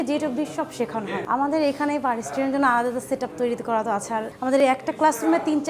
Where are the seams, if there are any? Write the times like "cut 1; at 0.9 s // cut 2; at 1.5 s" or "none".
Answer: cut 1; at 1.2 s // cut 2; at 4.3 s